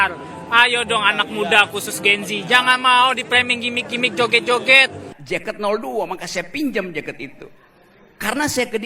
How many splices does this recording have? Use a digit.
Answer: 1